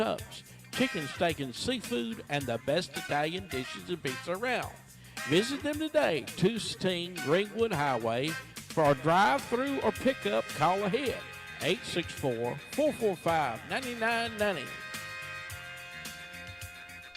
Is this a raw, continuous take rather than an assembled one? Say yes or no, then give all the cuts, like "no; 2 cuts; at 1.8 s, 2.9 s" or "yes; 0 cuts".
no; 1 cut; at 6.7 s